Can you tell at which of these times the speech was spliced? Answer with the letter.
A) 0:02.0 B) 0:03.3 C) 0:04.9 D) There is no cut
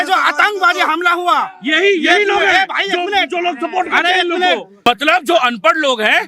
C